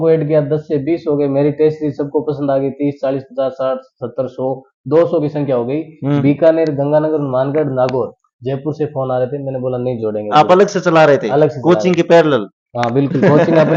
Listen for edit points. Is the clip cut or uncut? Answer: uncut